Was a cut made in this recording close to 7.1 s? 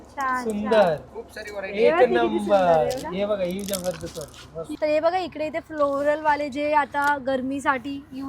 no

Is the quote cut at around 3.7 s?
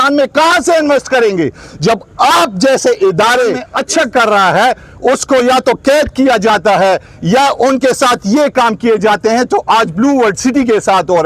yes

